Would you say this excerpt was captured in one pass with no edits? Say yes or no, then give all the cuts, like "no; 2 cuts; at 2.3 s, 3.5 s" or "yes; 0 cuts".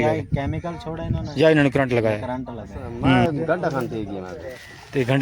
no; 1 cut; at 3.2 s